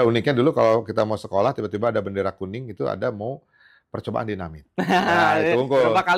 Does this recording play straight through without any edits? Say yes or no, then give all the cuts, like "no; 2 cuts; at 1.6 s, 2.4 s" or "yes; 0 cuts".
yes; 0 cuts